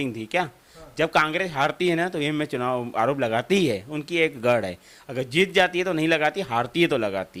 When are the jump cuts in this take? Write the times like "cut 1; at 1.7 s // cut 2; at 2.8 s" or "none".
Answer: none

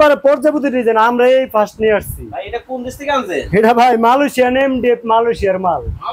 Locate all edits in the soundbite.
none

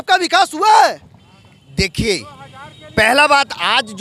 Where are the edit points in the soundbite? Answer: none

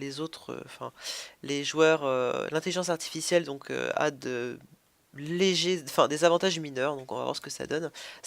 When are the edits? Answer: cut 1; at 4.4 s

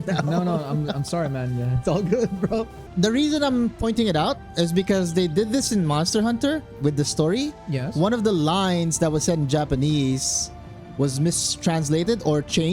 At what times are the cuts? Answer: cut 1; at 2.8 s

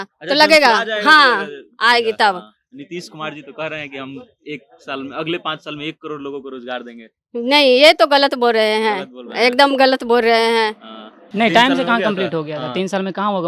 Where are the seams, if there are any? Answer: cut 1; at 11.2 s

